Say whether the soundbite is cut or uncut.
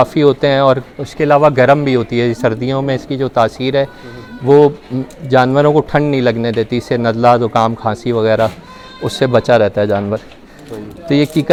uncut